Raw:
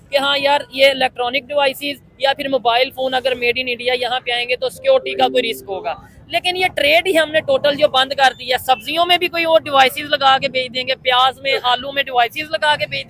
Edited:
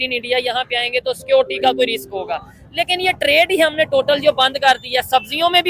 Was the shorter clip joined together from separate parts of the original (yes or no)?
no